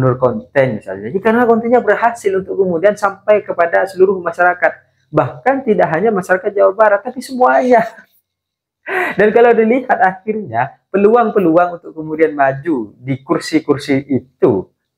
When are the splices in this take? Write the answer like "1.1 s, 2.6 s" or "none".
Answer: none